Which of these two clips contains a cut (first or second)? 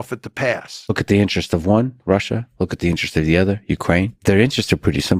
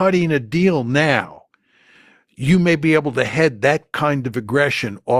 first